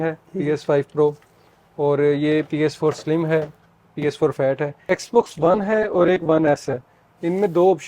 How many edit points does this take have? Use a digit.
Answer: 1